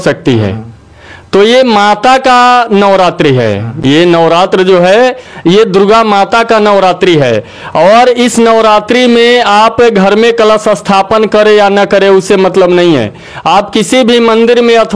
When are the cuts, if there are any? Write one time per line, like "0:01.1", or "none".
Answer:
none